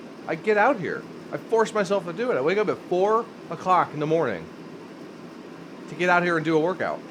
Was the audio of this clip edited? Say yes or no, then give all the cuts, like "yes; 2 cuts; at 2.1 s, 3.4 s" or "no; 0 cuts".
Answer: no; 0 cuts